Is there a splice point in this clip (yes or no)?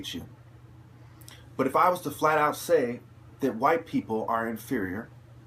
yes